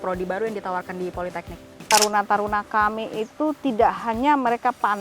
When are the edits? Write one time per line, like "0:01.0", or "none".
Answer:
0:01.8